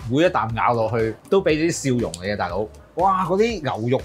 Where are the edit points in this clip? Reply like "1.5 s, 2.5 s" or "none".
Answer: 1.2 s, 2.8 s